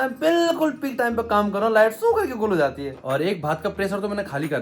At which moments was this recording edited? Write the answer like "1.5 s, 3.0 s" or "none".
3.0 s